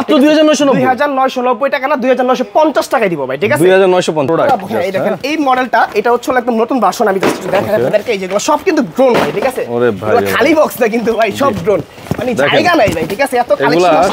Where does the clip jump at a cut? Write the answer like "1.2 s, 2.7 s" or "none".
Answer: 4.3 s